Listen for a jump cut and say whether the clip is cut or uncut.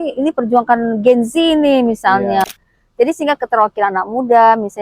cut